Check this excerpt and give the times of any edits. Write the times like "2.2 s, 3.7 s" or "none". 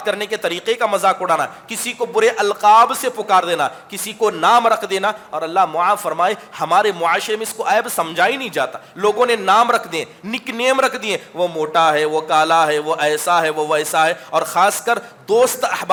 none